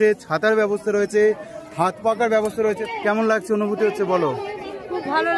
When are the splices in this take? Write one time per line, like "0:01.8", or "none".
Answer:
0:02.9